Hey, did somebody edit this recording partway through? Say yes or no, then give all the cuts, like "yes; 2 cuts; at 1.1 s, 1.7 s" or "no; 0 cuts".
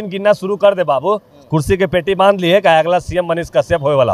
no; 0 cuts